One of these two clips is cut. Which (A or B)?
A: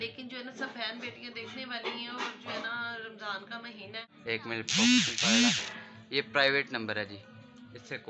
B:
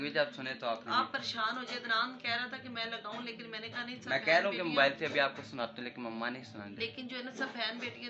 A